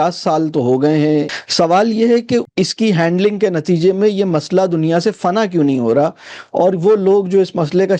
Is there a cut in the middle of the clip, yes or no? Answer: yes